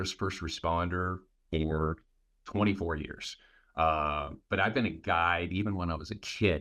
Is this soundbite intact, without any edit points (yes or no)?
yes